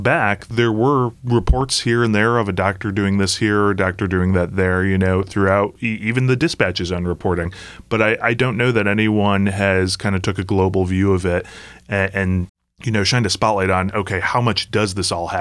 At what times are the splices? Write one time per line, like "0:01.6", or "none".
0:01.2